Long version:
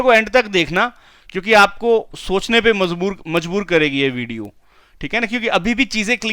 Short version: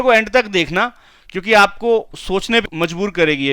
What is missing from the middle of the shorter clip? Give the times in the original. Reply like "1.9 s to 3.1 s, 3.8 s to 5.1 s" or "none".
2.6 s to 3.2 s